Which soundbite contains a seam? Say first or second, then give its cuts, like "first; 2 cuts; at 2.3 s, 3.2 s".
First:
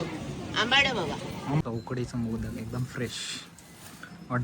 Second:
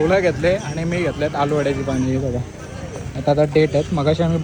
first; 1 cut; at 1.6 s